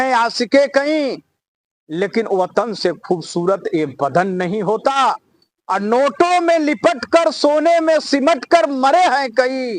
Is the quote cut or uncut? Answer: uncut